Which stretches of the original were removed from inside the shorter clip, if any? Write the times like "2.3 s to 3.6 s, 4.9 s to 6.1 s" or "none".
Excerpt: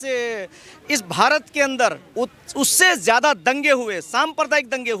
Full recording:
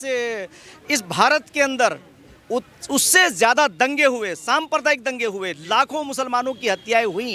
2.0 s to 2.4 s